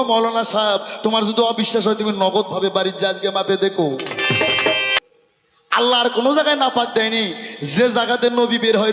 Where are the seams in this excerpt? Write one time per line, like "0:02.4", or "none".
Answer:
0:05.0